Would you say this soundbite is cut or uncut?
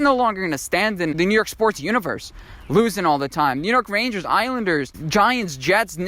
cut